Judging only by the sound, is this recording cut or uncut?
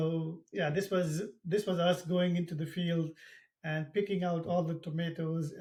uncut